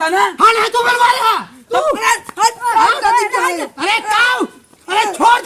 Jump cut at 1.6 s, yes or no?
yes